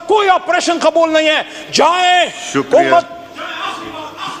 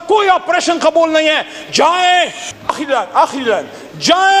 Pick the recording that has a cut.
second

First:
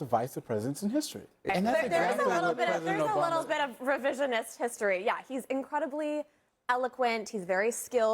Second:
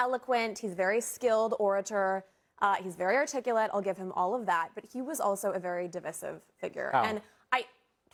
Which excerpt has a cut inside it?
first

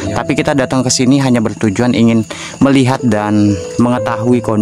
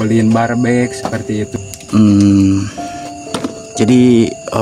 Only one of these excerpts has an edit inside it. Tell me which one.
second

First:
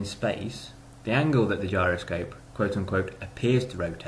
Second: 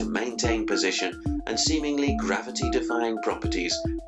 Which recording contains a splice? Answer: first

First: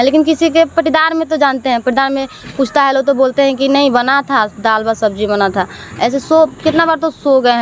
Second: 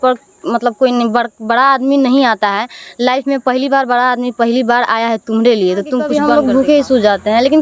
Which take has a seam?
second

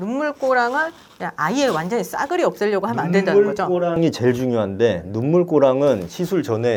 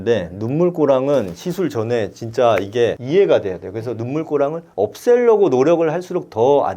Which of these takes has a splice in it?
second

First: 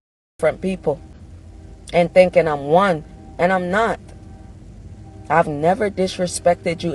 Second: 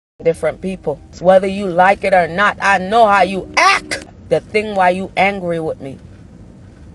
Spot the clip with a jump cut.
second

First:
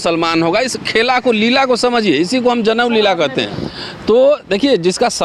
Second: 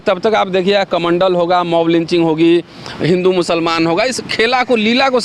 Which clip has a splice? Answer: first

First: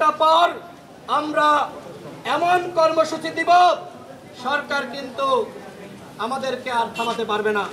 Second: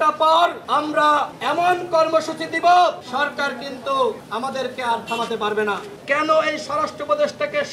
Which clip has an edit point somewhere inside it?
second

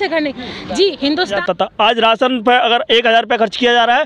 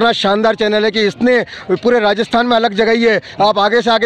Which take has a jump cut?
first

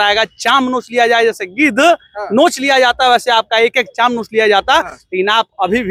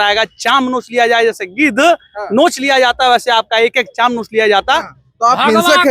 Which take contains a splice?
second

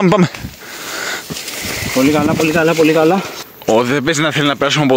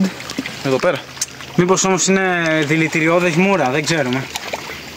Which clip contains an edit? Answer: first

